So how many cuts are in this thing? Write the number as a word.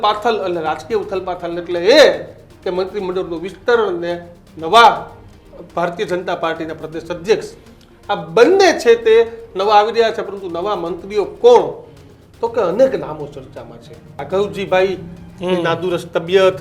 one